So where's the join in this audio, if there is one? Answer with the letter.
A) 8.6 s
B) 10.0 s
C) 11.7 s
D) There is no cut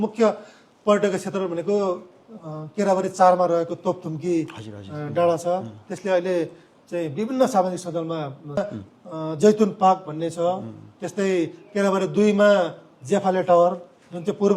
A